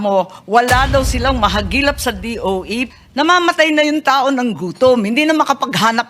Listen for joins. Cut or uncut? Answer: cut